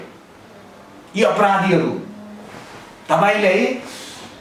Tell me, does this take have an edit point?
no; 0 cuts

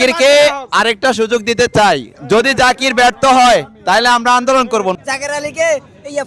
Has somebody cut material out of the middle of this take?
yes; 2 cuts; at 2.1 s, 5.0 s

